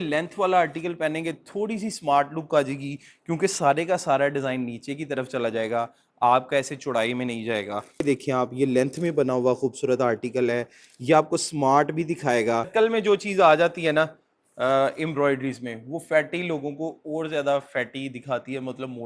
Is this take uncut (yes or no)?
no